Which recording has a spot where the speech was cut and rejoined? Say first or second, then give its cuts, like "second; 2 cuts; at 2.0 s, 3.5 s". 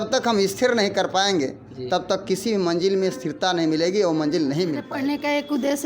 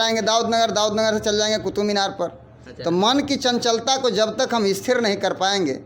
first; 1 cut; at 4.9 s